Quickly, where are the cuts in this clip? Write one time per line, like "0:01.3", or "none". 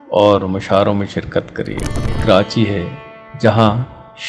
0:02.2